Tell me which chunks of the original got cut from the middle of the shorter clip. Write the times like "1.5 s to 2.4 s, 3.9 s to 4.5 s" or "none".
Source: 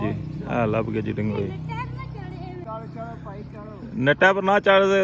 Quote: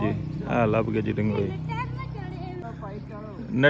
2.6 s to 3.1 s